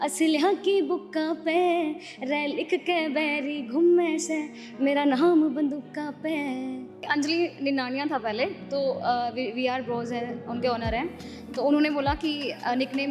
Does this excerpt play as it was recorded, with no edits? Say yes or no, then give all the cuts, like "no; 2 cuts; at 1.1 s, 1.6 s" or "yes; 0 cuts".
no; 1 cut; at 7.1 s